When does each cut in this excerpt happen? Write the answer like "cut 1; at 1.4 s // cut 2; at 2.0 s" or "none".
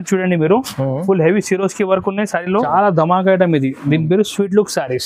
cut 1; at 2.7 s